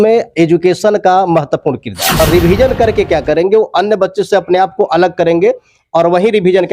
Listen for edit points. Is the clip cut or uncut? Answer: cut